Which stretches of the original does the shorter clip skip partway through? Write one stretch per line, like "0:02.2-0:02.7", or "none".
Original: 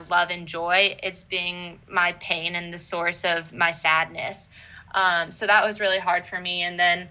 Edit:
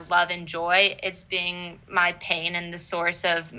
none